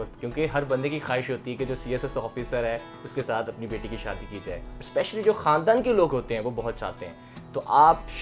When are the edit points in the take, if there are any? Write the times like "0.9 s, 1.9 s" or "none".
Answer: none